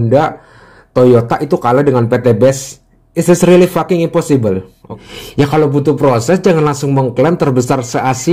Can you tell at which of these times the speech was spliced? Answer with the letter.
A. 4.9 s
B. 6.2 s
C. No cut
A